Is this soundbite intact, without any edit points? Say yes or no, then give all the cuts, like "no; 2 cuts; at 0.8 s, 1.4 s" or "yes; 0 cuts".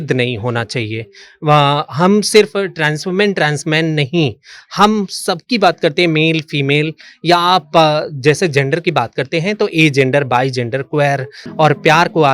no; 1 cut; at 11.4 s